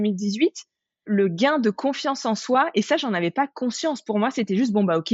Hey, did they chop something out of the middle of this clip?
no; 0 cuts

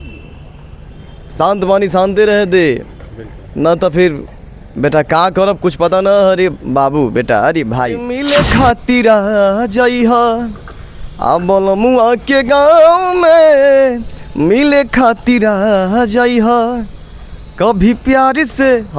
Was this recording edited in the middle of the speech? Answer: yes; 1 cut; at 8.1 s

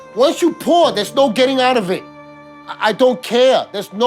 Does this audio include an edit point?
no; 0 cuts

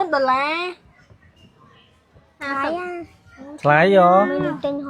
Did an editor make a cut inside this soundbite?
no; 0 cuts

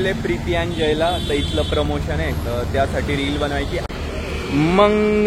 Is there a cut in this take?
yes; 1 cut; at 3.8 s

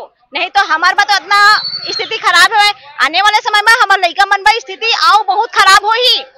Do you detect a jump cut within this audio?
no; 0 cuts

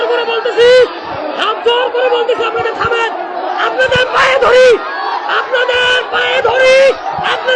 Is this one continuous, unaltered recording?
yes; 0 cuts

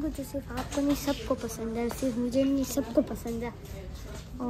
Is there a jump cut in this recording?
no; 0 cuts

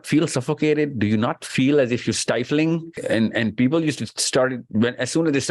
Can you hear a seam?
yes; 1 cut; at 2.9 s

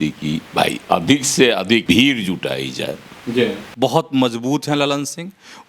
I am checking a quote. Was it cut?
yes; 2 cuts; at 1.8 s, 3.6 s

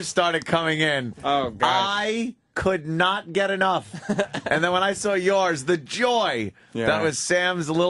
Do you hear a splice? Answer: no; 0 cuts

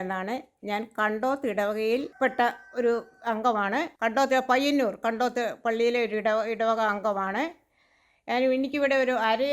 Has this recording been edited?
yes; 2 cuts; at 2.1 s, 3.9 s

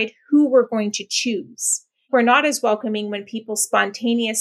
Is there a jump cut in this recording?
yes; 1 cut; at 2.1 s

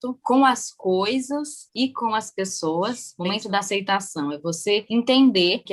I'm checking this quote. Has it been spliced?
yes; 1 cut; at 3.1 s

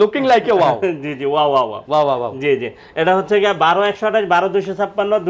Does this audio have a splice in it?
no; 0 cuts

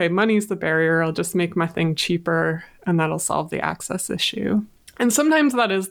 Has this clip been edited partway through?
yes; 1 cut; at 4.8 s

